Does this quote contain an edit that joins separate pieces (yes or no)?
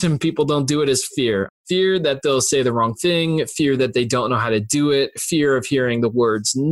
yes